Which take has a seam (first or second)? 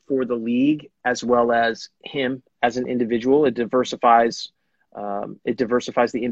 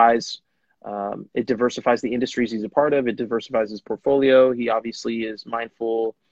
first